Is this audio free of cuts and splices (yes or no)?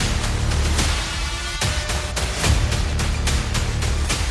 yes